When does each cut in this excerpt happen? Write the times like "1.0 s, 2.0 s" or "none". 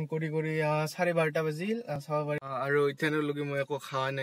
2.0 s